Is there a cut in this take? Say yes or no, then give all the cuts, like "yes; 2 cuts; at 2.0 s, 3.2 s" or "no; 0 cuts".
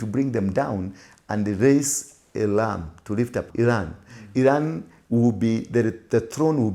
yes; 1 cut; at 3.5 s